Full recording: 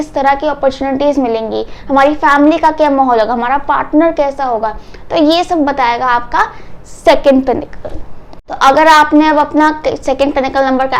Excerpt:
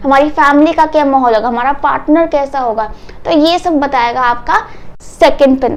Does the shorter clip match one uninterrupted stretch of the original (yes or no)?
yes